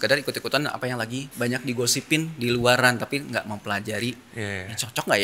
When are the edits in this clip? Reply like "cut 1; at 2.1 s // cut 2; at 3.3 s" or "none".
none